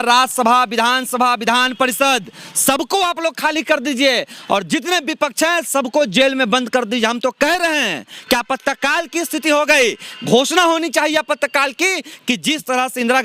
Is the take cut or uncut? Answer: uncut